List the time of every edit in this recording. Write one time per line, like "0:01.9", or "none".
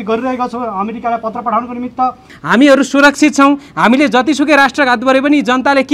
0:02.4